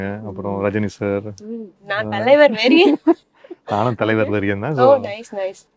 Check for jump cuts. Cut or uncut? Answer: uncut